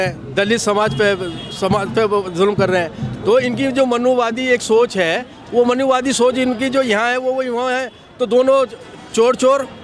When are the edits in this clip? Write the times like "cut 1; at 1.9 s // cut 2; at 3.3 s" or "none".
none

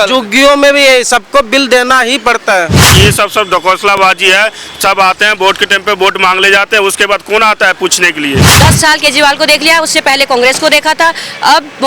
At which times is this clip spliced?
cut 1; at 2.9 s // cut 2; at 8.5 s

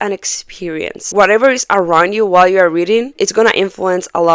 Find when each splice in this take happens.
cut 1; at 1.0 s // cut 2; at 3.1 s

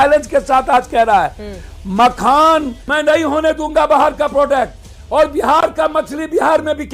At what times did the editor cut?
cut 1; at 1.4 s // cut 2; at 2.8 s

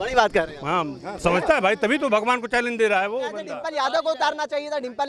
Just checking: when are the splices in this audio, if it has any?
cut 1; at 3.4 s

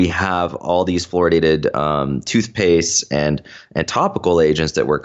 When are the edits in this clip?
none

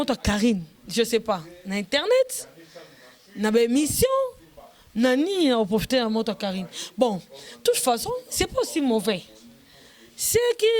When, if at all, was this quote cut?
none

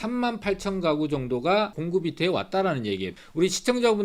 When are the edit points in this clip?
cut 1; at 1.8 s // cut 2; at 3.2 s

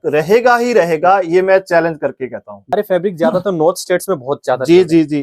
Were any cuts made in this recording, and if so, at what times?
cut 1; at 2.7 s

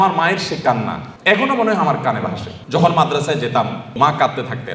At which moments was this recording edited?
cut 1; at 1.1 s // cut 2; at 2.5 s // cut 3; at 4.0 s

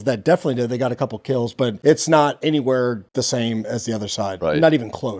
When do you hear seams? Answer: cut 1; at 1.8 s // cut 2; at 3.0 s

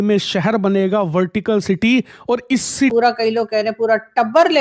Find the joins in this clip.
cut 1; at 2.9 s

